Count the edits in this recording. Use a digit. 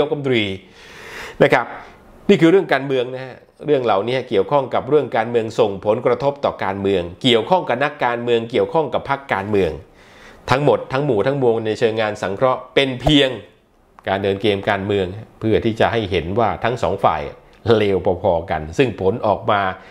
0